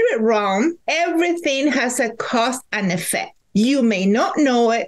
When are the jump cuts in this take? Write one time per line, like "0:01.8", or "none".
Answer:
0:00.8
0:03.4